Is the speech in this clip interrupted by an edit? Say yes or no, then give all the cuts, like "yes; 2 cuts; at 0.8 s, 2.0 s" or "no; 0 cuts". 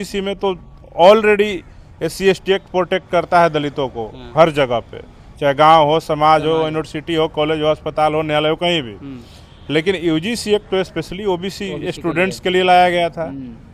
no; 0 cuts